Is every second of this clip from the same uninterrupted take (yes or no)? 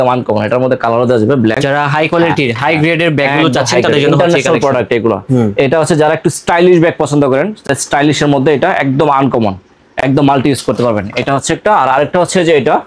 yes